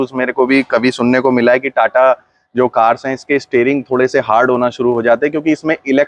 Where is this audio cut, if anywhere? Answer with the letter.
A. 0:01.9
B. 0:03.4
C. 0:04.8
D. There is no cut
D